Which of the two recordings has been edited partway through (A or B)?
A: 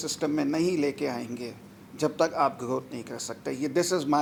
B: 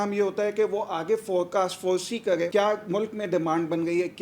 B